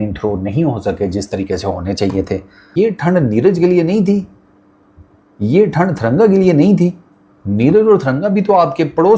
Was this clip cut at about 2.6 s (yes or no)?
yes